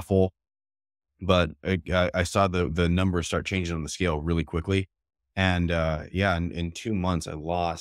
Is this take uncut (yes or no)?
yes